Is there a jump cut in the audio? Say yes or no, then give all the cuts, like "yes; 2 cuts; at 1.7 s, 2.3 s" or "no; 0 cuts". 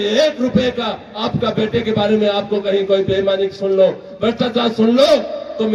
no; 0 cuts